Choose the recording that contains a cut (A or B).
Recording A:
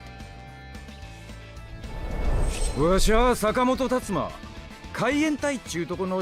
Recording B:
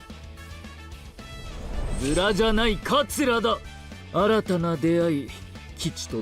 B